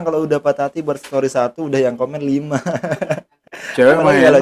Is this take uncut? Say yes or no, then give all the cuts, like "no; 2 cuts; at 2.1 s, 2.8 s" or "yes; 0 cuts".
no; 1 cut; at 3.3 s